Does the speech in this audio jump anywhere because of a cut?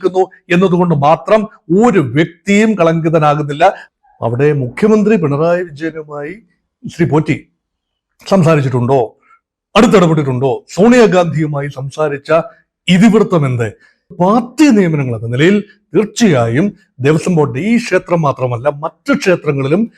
yes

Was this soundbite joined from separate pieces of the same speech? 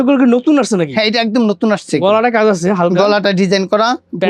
no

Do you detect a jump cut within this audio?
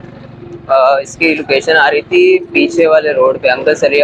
no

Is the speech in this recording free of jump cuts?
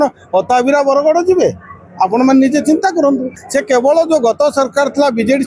no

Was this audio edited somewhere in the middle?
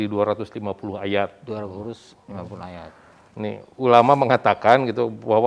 no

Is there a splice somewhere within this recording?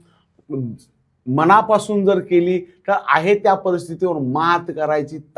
no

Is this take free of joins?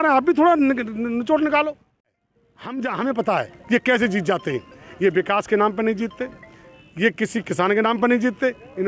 no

